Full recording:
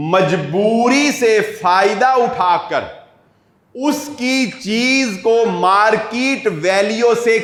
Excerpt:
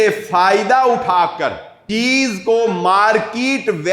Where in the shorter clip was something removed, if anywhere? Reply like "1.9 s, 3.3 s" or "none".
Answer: 1.8 s